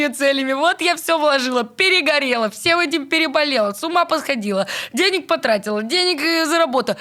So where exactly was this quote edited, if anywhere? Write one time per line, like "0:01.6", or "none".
none